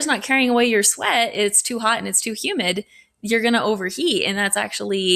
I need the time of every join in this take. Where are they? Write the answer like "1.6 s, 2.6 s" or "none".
none

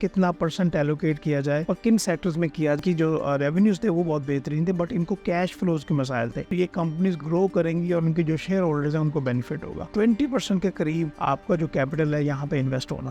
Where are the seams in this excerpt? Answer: 1.6 s, 2.8 s, 6.5 s, 9.9 s, 11.1 s

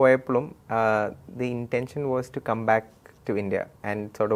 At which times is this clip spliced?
none

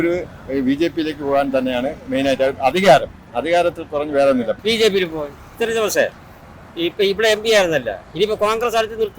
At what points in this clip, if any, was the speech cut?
4.6 s, 5.5 s

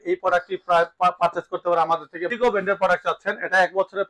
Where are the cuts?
2.3 s

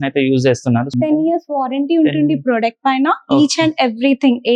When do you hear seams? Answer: 0.9 s

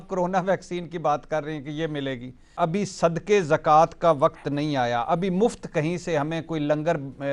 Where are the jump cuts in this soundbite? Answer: 2.5 s

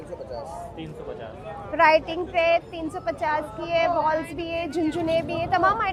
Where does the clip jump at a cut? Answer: none

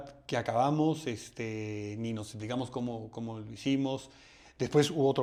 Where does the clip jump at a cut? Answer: none

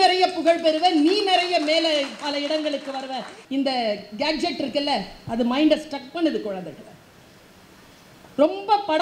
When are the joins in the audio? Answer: 3.3 s

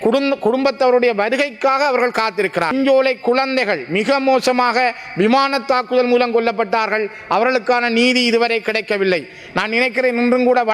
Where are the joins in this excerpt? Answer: 2.7 s

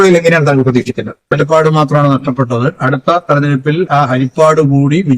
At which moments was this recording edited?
1.2 s

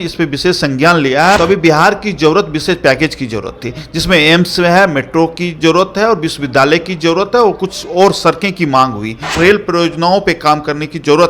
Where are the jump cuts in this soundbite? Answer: 1.4 s, 9.3 s

